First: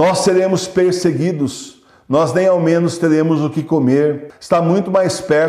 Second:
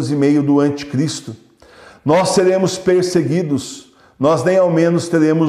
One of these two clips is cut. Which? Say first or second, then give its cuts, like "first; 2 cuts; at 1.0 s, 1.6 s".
first; 1 cut; at 4.3 s